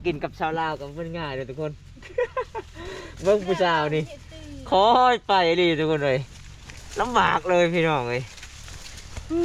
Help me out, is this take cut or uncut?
uncut